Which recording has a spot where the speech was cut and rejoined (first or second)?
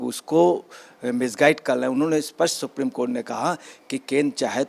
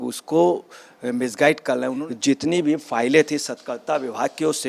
second